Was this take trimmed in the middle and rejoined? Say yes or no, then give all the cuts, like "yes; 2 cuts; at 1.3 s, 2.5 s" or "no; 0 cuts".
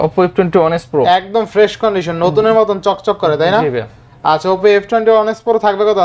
no; 0 cuts